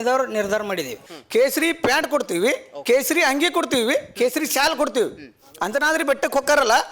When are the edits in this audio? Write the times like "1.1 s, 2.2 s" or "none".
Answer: 1.1 s